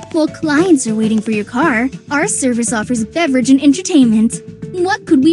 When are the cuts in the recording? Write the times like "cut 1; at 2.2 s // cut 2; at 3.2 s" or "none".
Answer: none